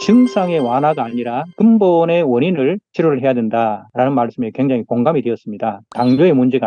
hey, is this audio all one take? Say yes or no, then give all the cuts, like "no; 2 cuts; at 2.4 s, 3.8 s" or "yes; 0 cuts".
yes; 0 cuts